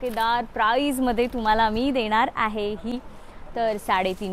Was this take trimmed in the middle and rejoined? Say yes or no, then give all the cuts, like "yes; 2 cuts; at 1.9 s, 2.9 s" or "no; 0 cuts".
yes; 1 cut; at 2.9 s